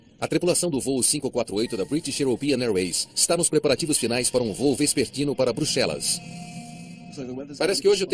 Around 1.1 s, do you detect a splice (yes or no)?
no